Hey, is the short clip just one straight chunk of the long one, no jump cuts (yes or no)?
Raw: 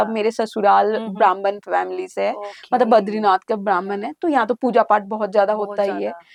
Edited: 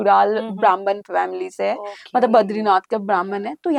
yes